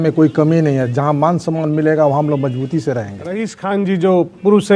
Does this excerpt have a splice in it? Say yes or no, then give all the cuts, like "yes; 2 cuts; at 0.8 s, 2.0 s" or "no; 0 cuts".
yes; 1 cut; at 3.5 s